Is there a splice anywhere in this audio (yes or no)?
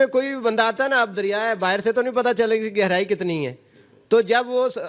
no